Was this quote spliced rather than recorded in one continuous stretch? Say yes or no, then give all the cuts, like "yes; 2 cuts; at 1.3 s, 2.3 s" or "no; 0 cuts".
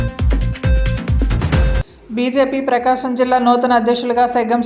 yes; 1 cut; at 1.3 s